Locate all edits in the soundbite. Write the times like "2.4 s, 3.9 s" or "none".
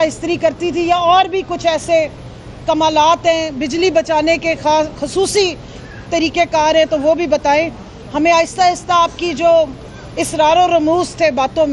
none